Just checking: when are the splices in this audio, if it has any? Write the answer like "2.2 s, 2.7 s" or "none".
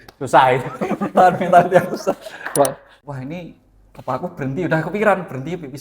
3.0 s